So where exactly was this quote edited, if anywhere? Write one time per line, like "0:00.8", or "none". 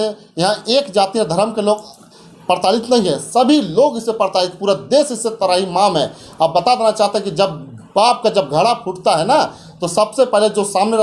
none

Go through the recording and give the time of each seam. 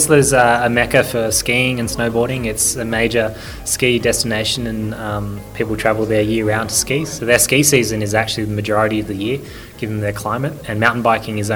none

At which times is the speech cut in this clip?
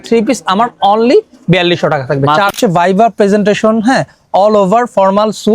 0:02.5

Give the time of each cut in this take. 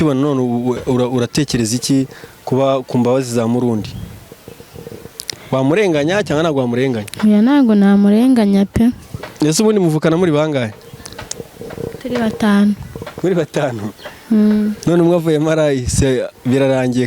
none

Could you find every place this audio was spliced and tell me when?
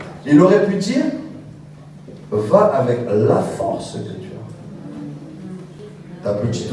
0:05.7

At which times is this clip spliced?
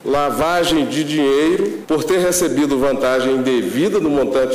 0:01.8

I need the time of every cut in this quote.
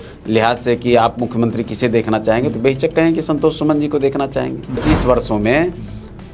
0:04.8

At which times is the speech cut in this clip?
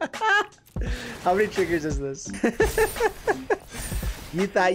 0:02.2
0:03.6

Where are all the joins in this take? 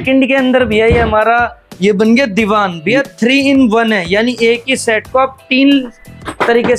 none

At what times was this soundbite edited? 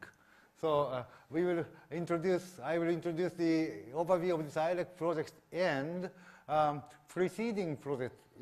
0:04.9

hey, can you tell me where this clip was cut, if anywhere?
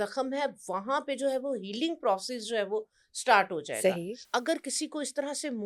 0:04.2

